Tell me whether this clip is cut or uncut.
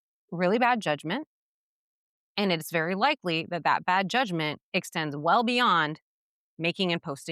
uncut